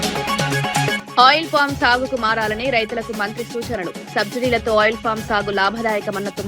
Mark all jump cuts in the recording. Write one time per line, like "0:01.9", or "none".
0:01.0